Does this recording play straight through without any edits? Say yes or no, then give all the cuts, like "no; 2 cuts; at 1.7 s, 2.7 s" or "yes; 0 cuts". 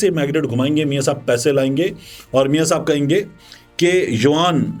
yes; 0 cuts